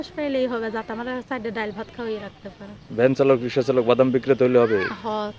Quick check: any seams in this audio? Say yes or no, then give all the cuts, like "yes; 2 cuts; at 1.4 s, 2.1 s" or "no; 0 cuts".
no; 0 cuts